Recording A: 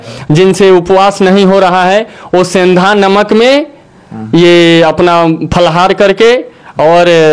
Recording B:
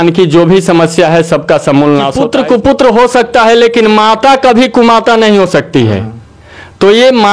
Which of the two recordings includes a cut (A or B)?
B